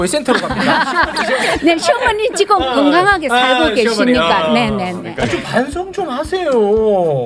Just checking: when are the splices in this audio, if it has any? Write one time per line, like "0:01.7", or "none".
0:05.0